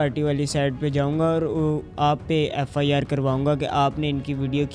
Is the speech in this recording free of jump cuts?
yes; 0 cuts

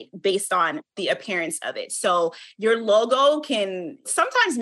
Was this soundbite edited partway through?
no; 0 cuts

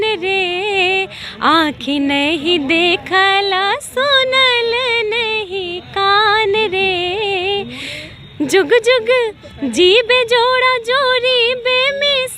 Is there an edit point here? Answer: no; 0 cuts

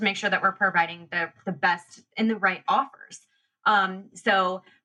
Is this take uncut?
yes; 0 cuts

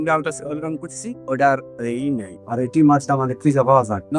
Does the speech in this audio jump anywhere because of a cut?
no; 0 cuts

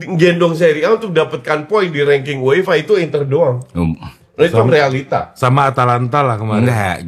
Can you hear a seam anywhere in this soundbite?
no; 0 cuts

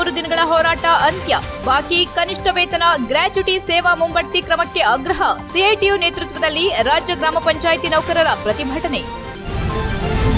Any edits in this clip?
yes; 1 cut; at 9.3 s

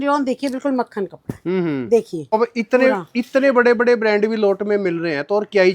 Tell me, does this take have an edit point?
yes; 1 cut; at 2.3 s

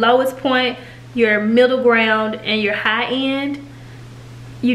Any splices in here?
no; 0 cuts

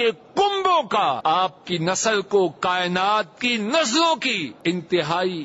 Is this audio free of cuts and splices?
no; 2 cuts; at 1.2 s, 4.5 s

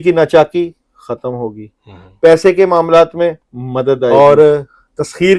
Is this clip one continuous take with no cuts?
no; 1 cut; at 4.1 s

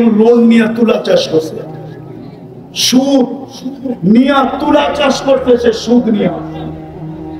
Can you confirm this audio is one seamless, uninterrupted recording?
no; 1 cut; at 6.4 s

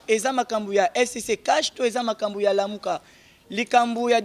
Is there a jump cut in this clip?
no; 0 cuts

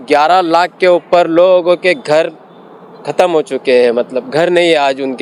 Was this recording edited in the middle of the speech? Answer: no; 0 cuts

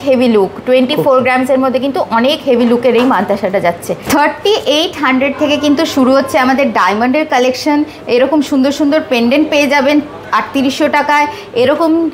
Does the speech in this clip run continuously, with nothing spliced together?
no; 1 cut; at 4.0 s

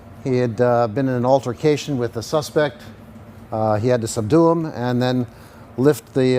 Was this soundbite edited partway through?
yes; 1 cut; at 1.5 s

